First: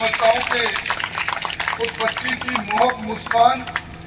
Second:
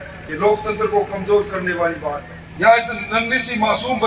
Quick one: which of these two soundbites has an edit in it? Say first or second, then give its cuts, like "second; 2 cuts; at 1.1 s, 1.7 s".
second; 1 cut; at 2.3 s